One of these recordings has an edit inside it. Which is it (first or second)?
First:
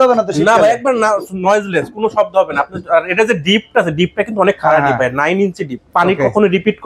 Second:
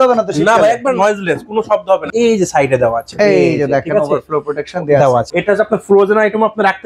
second